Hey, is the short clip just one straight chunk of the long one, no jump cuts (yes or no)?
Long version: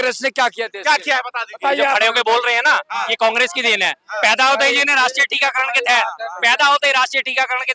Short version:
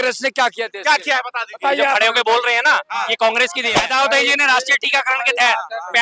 no